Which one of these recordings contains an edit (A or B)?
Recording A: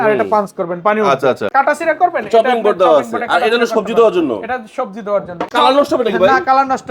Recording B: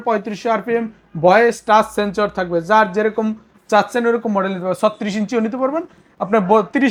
A